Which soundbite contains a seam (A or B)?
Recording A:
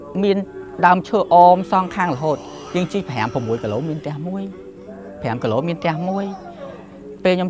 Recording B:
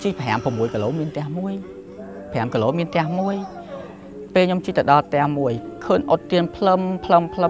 B